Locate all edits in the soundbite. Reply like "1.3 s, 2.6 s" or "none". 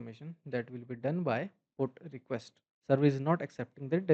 2.7 s